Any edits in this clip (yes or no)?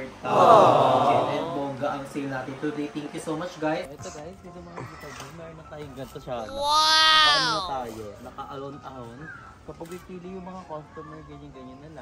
yes